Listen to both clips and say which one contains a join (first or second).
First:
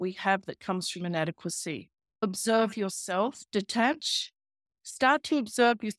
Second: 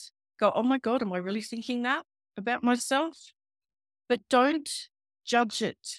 first